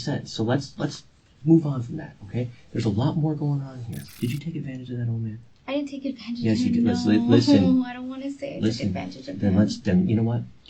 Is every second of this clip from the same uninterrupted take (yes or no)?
no